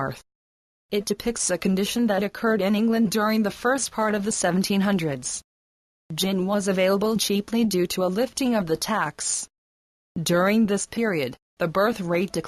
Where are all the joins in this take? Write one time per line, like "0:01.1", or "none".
none

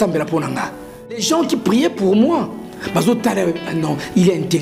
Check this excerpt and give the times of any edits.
0:01.2

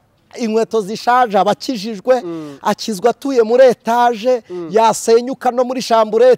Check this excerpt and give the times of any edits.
none

